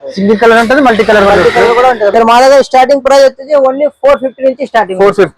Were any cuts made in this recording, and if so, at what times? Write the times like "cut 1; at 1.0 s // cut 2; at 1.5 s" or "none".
cut 1; at 2.1 s